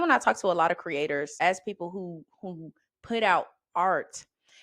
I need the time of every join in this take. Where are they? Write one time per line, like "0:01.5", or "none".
0:01.3